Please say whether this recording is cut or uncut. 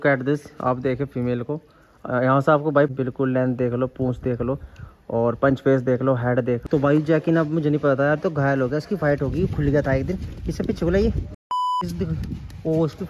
cut